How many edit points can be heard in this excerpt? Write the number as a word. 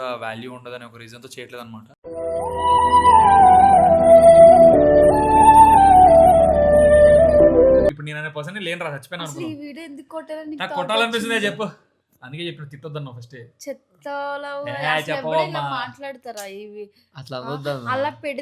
one